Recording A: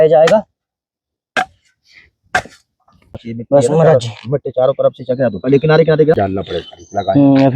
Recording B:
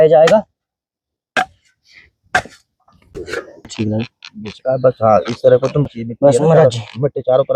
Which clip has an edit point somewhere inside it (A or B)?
A